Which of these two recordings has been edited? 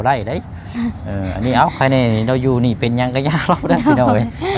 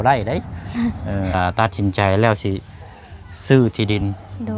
second; 1 cut; at 1.3 s

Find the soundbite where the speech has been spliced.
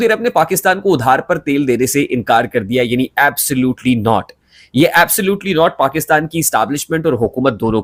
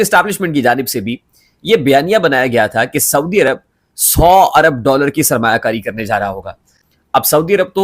second; 1 cut; at 6.8 s

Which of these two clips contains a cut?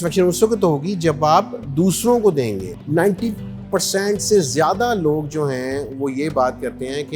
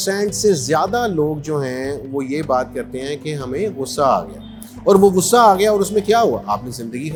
first; 1 cut; at 2.7 s

